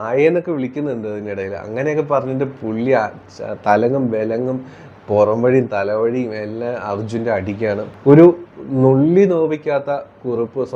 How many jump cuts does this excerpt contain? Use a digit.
1